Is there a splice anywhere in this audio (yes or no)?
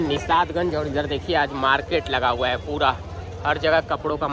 no